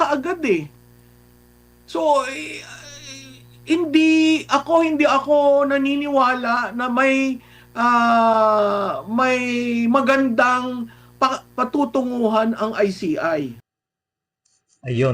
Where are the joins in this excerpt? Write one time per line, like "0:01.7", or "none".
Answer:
none

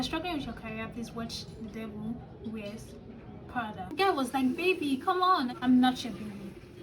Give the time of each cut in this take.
0:03.9
0:05.5

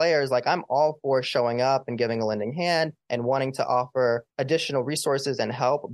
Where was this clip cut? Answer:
0:03.0
0:04.3

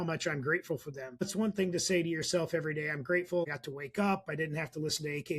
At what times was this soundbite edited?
0:01.3
0:03.4

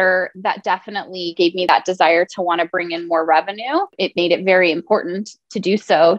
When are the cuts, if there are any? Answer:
0:01.7
0:03.9

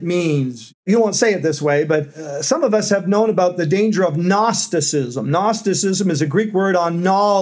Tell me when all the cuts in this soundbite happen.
0:00.8
0:02.2

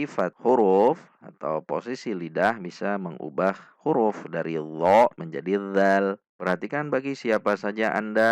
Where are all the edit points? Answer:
0:06.3

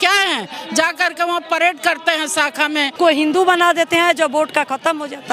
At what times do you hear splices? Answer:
0:02.9

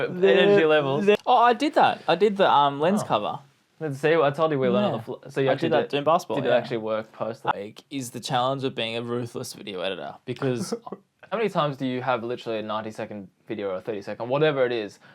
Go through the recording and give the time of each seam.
0:01.2
0:07.5
0:11.2

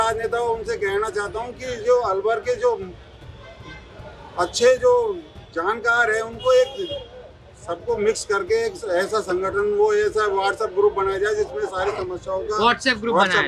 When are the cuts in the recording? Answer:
none

